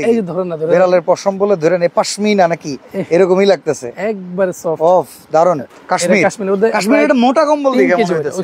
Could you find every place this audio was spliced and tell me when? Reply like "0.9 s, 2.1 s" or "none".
5.7 s